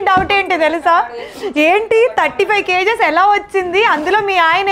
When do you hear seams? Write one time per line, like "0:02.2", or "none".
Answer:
none